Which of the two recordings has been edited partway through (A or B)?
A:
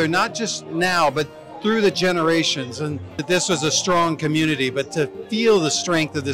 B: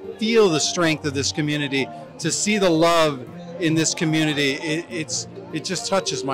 A